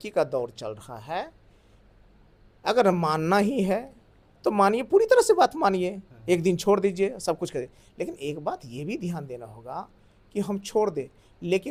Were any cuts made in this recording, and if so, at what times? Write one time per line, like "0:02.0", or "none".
none